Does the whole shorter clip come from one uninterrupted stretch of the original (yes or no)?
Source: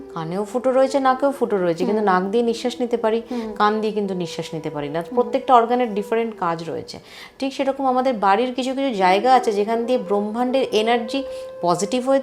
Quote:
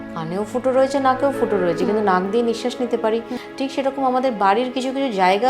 no